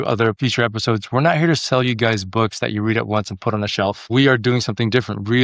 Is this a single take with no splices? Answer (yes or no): no